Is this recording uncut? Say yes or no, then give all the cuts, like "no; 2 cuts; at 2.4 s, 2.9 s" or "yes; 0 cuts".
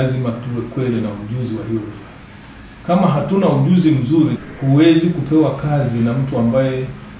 no; 1 cut; at 4.4 s